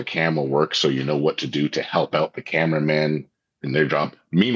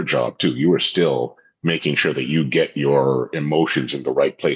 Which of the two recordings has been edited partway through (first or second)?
first